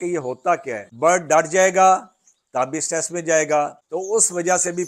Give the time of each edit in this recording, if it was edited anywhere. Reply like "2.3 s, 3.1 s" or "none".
0.9 s, 3.8 s